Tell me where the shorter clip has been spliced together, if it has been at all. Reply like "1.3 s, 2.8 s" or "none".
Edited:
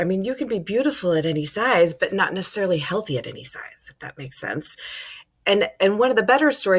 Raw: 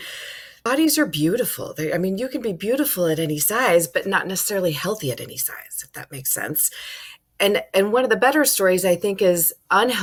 none